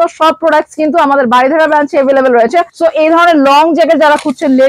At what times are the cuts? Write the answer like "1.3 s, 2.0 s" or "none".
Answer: 2.7 s